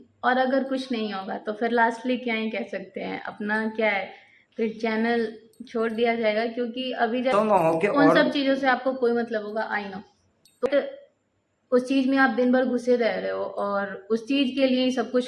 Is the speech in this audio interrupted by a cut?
yes; 2 cuts; at 7.3 s, 10.7 s

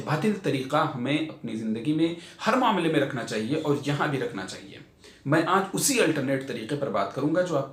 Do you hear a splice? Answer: no; 0 cuts

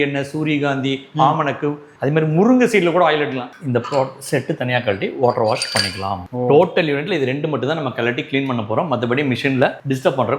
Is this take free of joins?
no; 2 cuts; at 1.9 s, 3.5 s

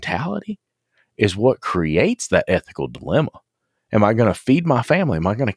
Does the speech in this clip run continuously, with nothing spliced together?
yes; 0 cuts

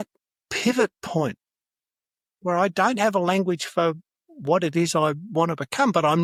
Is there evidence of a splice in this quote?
no; 0 cuts

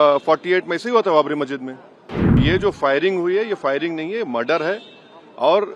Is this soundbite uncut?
no; 1 cut; at 2.4 s

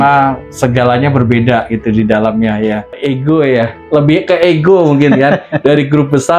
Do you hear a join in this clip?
yes; 1 cut; at 2.9 s

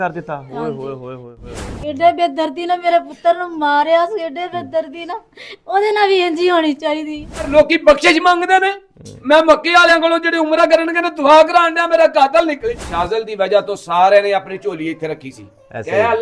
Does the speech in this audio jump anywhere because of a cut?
yes; 3 cuts; at 1.3 s, 7.5 s, 12.9 s

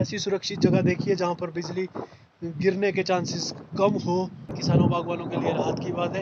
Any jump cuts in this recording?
yes; 1 cut; at 4.6 s

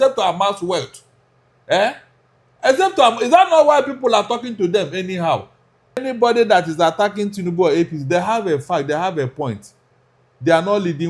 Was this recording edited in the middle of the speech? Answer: yes; 1 cut; at 6.1 s

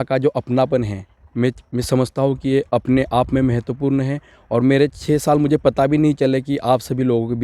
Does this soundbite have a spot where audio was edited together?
no; 0 cuts

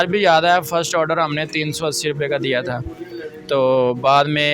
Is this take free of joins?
yes; 0 cuts

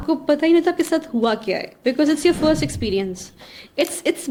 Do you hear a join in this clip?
no; 0 cuts

